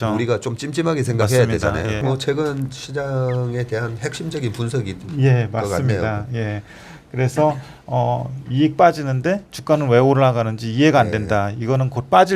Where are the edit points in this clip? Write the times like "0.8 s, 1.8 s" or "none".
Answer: 2.0 s